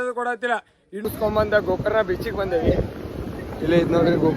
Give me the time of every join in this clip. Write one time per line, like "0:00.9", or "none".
0:01.0